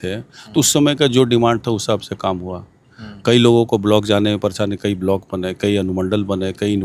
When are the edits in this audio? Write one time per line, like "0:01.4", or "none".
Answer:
none